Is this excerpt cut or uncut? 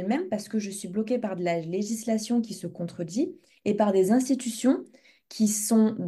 uncut